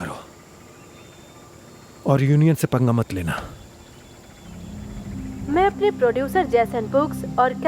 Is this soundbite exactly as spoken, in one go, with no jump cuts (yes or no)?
no